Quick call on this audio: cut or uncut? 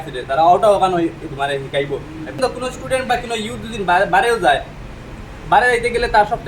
cut